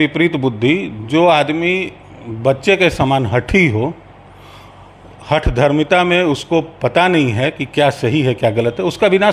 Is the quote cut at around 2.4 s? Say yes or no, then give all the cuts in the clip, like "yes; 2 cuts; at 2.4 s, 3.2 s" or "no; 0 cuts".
no; 0 cuts